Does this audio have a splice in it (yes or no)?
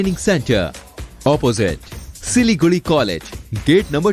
no